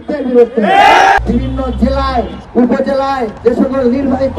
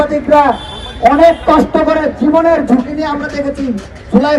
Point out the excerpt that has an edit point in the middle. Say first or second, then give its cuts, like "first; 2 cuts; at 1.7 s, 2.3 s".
first; 3 cuts; at 1.2 s, 2.4 s, 3.3 s